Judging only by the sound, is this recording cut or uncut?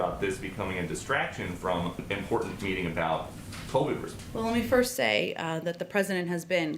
cut